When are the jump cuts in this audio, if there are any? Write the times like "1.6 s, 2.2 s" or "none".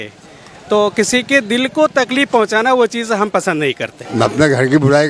3.9 s

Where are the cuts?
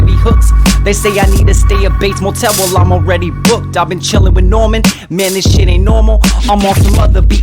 3.7 s

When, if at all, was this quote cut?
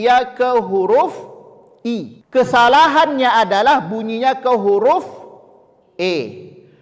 2.1 s

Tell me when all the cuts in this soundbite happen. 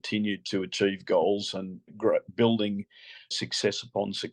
1.9 s, 3.3 s

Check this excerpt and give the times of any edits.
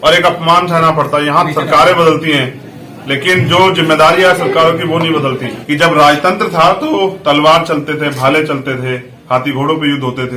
5.5 s

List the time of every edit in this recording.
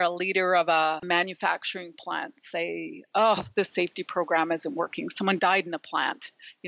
none

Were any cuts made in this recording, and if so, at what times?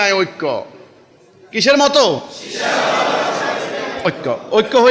none

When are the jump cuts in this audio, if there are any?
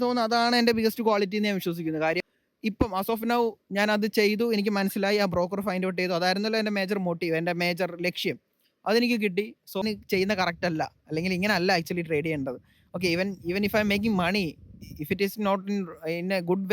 2.3 s, 9.8 s

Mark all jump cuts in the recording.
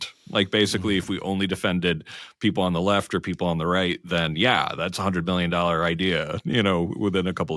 none

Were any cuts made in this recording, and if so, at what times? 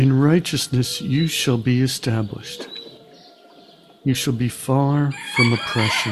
none

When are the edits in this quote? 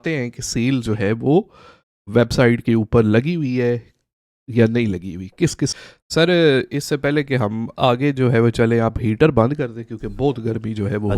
5.8 s

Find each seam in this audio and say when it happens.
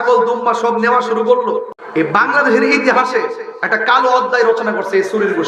1.8 s

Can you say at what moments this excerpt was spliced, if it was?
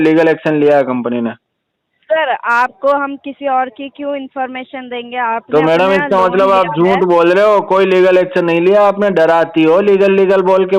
none

